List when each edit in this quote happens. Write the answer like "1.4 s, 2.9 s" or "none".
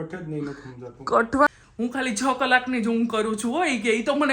1.5 s